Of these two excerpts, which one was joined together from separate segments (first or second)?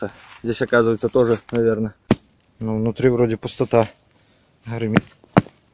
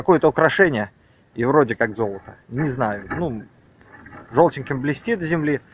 first